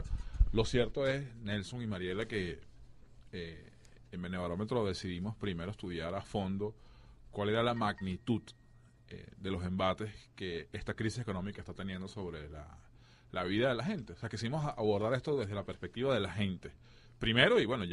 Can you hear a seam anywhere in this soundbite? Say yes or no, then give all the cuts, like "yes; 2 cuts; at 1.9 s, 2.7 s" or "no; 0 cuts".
no; 0 cuts